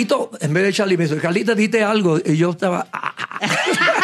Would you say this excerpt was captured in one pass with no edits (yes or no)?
yes